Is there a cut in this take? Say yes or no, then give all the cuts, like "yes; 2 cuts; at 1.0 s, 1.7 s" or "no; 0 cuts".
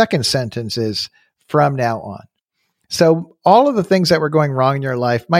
no; 0 cuts